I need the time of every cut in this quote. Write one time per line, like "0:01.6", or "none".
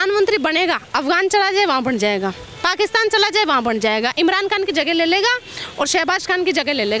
none